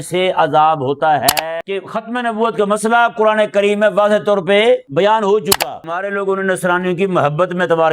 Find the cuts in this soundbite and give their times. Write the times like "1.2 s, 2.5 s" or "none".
1.3 s, 4.9 s, 6.0 s